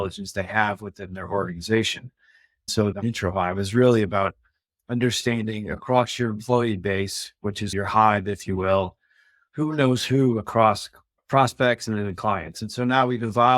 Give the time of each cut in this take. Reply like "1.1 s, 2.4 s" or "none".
2.8 s, 11.2 s

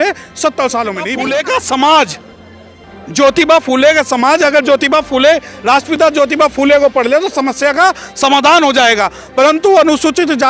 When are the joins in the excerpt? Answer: 1.2 s

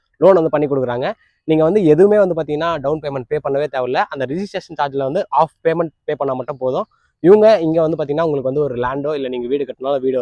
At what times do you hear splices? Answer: none

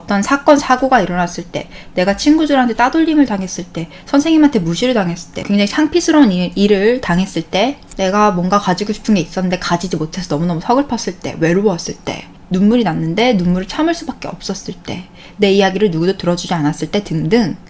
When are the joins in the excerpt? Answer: 5.4 s, 7.8 s

